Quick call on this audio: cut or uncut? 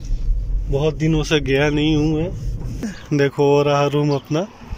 cut